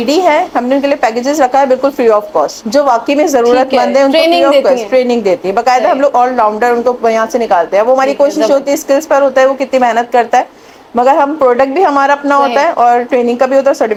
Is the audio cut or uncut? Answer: uncut